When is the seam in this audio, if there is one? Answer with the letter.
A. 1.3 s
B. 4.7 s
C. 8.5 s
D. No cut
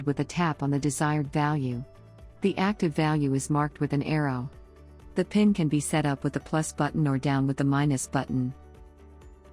C